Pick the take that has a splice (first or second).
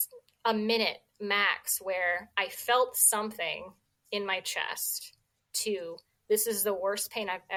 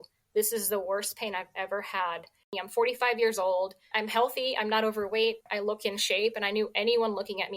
second